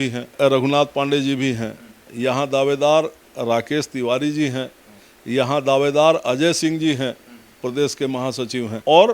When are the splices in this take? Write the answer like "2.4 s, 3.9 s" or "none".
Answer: none